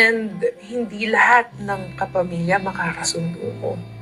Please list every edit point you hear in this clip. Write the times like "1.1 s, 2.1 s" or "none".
none